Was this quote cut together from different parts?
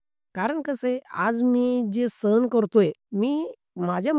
no; 0 cuts

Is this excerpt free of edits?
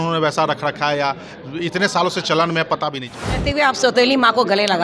no; 1 cut; at 3.5 s

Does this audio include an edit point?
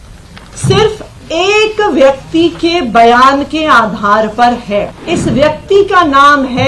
yes; 1 cut; at 5.0 s

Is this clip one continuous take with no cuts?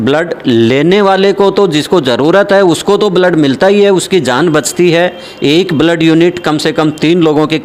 yes; 0 cuts

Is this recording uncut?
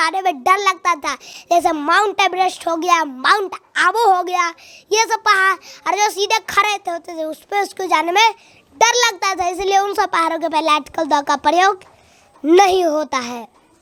yes; 0 cuts

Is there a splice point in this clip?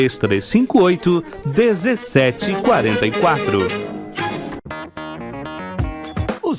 yes; 1 cut; at 4.7 s

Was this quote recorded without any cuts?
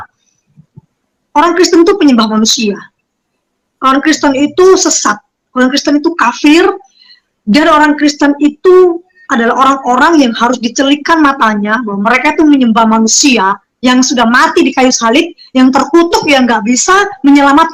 yes; 0 cuts

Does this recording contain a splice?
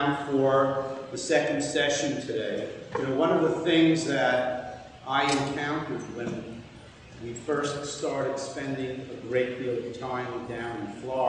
no; 0 cuts

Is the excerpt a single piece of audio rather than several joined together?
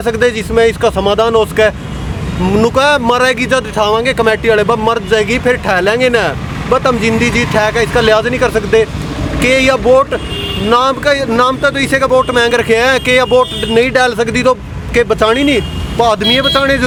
yes; 0 cuts

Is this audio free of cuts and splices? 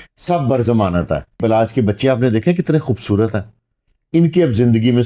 no; 1 cut; at 1.4 s

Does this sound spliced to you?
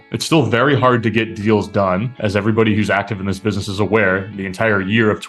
no; 0 cuts

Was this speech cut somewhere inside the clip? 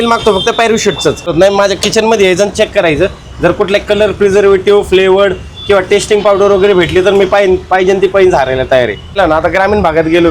yes; 2 cuts; at 1.3 s, 9.2 s

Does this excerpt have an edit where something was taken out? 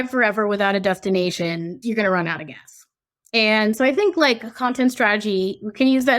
yes; 1 cut; at 1.7 s

